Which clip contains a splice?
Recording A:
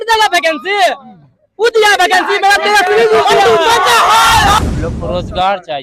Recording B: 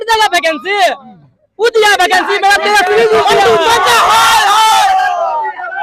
A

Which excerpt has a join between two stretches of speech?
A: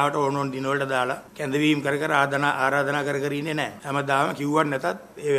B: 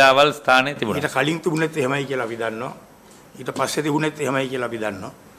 A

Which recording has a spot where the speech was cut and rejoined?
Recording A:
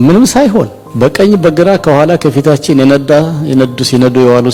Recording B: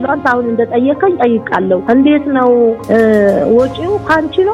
B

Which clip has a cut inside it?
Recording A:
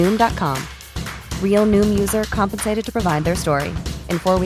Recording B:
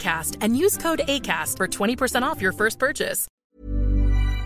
B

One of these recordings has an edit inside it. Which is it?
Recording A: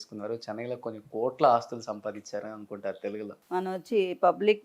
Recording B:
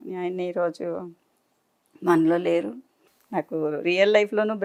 A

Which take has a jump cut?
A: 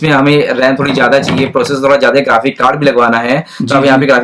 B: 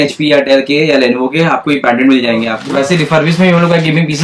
B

